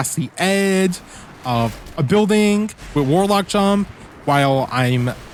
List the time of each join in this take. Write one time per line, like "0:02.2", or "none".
none